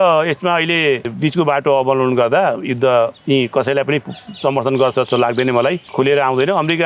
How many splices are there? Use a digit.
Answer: 3